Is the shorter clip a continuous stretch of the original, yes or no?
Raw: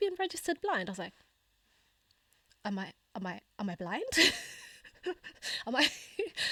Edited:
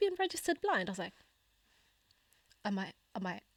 yes